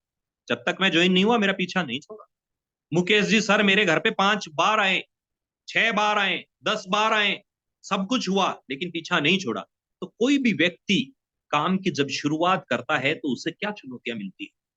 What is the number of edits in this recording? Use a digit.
0